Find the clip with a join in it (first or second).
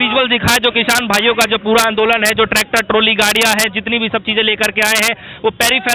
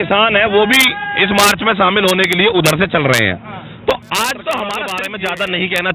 second